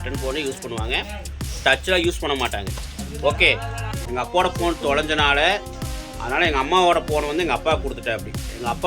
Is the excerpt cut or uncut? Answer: cut